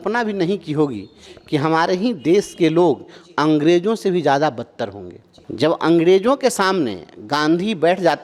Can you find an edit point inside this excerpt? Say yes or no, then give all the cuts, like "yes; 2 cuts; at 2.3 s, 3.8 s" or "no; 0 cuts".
no; 0 cuts